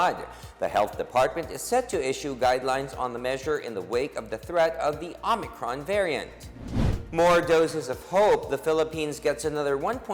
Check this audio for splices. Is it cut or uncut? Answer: uncut